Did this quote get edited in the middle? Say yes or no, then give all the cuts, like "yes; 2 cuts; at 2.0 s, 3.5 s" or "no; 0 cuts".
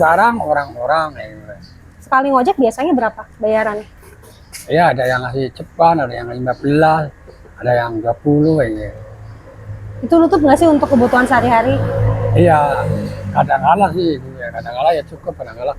no; 0 cuts